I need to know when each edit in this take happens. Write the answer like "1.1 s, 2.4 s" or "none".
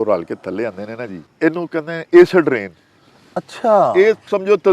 1.2 s